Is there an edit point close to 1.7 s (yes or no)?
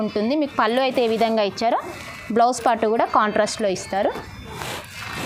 no